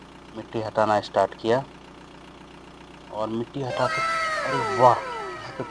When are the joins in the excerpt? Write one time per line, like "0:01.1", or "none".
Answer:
none